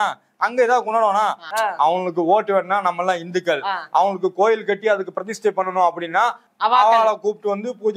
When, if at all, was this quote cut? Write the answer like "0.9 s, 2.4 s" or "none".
1.5 s, 6.4 s